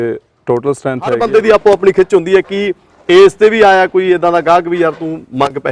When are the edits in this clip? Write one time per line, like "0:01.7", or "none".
0:01.2